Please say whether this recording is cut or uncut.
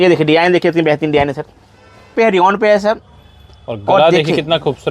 cut